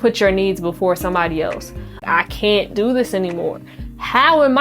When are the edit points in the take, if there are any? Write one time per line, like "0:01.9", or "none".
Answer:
0:02.0